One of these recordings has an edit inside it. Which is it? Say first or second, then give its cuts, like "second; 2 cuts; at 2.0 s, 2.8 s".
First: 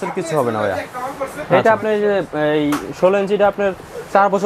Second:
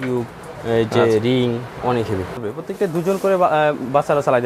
second; 1 cut; at 2.4 s